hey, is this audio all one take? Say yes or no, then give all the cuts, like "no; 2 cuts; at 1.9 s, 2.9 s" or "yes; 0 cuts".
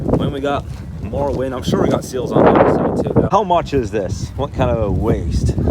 no; 1 cut; at 3.3 s